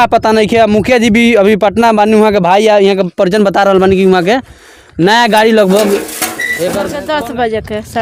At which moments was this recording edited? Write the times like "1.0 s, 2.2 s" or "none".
none